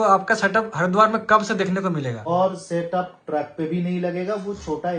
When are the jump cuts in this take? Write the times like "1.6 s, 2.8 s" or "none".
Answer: 2.2 s